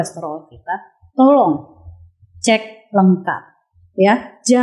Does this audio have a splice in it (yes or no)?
no